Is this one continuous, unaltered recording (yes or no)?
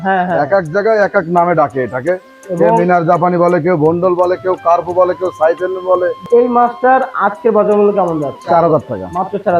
no